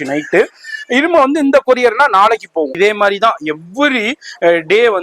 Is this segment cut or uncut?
cut